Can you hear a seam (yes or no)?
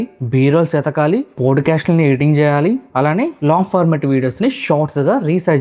no